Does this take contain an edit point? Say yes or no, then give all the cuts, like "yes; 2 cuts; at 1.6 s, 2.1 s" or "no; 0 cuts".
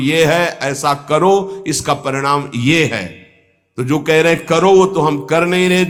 no; 0 cuts